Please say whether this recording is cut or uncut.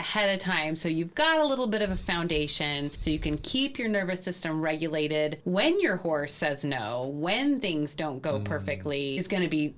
cut